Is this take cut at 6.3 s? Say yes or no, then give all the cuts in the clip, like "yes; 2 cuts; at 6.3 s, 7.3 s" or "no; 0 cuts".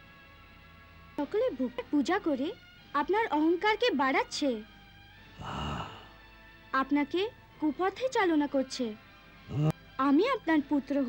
no; 2 cuts; at 1.2 s, 9.8 s